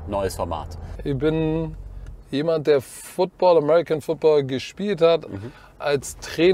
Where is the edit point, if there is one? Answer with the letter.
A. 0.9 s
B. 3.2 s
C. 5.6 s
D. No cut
A